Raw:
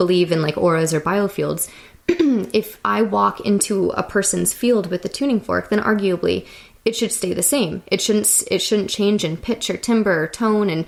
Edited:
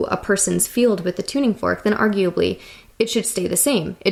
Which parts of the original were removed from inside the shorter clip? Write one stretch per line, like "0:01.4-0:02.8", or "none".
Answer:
none